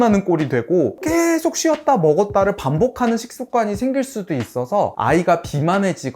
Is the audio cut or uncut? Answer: cut